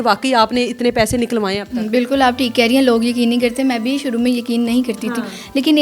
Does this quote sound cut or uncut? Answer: uncut